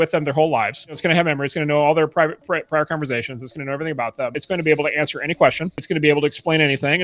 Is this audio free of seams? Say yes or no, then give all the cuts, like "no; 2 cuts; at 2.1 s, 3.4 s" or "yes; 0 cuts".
no; 3 cuts; at 1.0 s, 4.4 s, 5.8 s